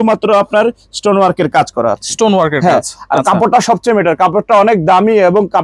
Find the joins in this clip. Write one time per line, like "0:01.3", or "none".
none